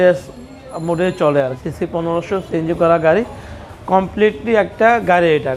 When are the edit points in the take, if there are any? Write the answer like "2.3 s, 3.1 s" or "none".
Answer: 1.5 s